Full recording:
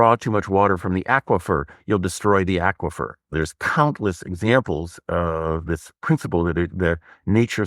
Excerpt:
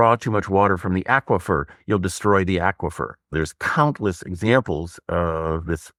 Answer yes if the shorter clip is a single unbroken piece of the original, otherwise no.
yes